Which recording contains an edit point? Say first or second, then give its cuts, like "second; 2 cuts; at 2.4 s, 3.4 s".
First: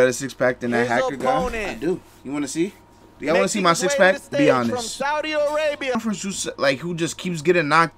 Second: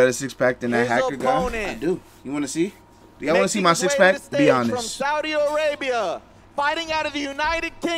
first; 1 cut; at 5.9 s